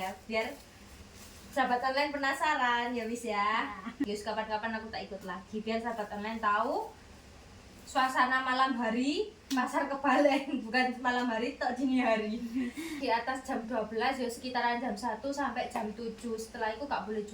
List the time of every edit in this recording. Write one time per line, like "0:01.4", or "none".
0:04.0
0:13.0